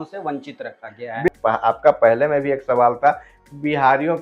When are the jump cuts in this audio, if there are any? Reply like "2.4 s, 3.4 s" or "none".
1.3 s

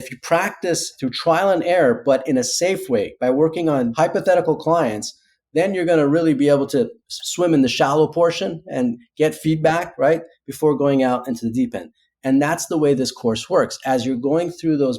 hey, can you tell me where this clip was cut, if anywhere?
0.9 s, 3.9 s

